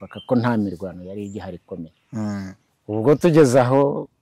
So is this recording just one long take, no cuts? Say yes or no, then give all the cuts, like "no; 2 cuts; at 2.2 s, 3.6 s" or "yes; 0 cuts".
no; 1 cut; at 2.7 s